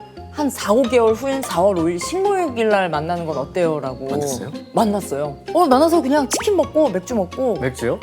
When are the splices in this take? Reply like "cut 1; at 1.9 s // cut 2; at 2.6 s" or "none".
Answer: cut 1; at 5.4 s